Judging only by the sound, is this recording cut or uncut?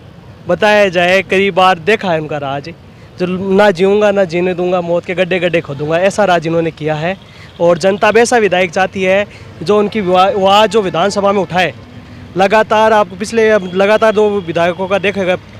uncut